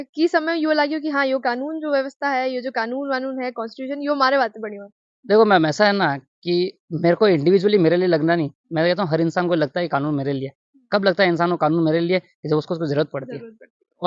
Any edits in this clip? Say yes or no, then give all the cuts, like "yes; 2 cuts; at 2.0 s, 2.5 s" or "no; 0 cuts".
no; 0 cuts